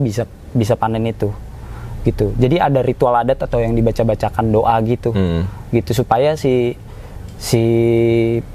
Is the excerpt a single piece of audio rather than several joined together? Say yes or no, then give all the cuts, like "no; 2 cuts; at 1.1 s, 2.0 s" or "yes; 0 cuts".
yes; 0 cuts